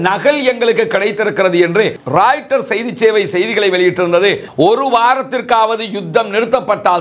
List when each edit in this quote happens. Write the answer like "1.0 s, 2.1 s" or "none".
4.5 s